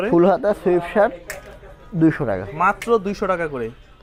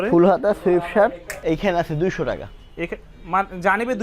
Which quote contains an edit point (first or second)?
second